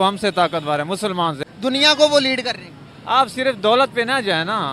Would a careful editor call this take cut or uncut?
cut